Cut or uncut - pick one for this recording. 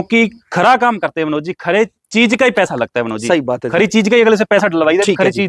uncut